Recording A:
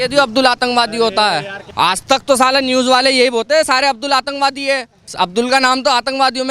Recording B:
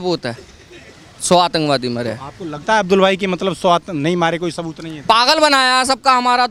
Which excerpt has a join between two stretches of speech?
A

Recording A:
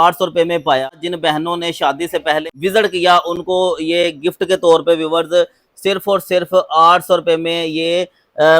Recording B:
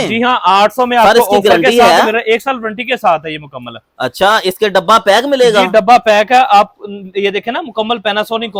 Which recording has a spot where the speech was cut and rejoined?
A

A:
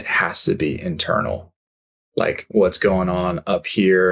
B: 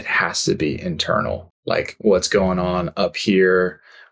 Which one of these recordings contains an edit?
B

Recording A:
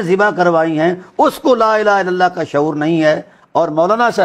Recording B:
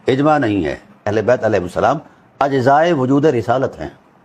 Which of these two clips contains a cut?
B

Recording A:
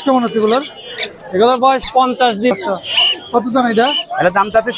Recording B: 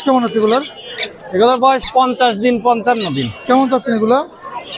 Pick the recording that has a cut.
A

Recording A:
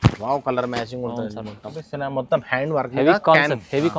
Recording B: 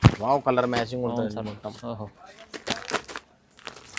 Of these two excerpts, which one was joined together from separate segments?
A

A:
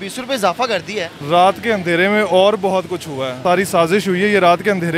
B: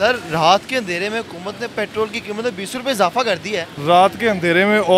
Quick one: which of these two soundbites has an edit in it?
A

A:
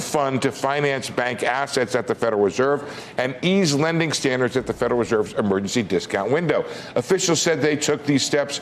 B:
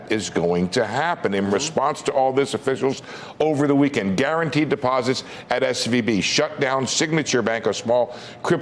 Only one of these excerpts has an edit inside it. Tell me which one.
B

